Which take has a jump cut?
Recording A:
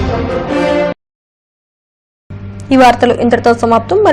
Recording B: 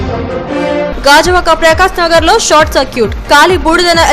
B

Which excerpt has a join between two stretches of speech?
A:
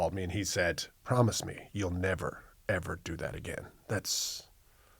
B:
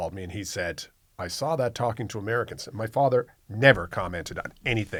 A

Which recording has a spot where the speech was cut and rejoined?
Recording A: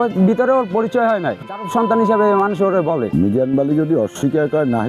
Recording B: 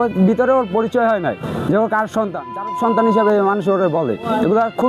A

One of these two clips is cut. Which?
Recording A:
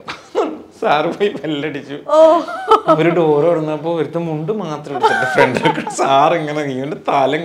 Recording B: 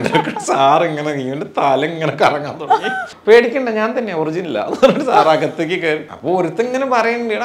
B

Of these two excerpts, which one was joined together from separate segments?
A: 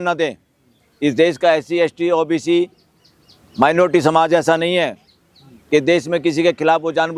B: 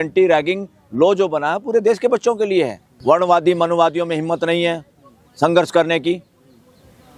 B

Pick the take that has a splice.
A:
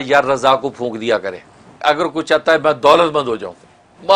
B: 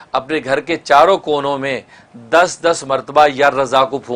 A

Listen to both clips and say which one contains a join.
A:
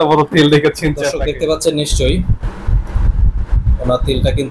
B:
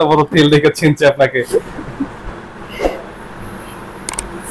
A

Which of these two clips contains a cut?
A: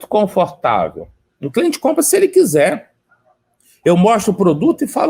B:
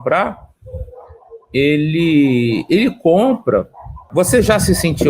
B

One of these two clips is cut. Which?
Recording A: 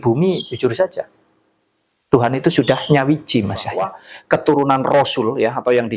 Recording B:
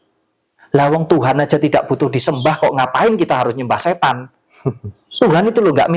A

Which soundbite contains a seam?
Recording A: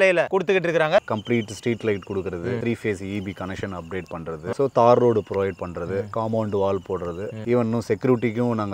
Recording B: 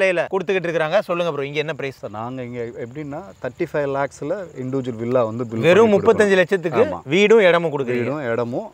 A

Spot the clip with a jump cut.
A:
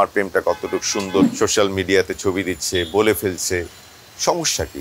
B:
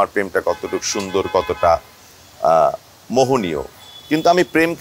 A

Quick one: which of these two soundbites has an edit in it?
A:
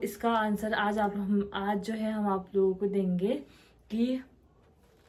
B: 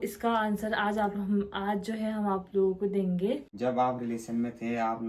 B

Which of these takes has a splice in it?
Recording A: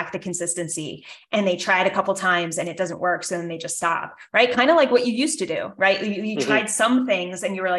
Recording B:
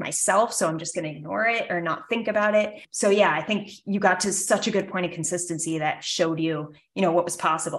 B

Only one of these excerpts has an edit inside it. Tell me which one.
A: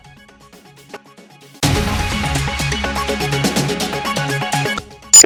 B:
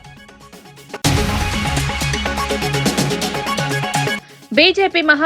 B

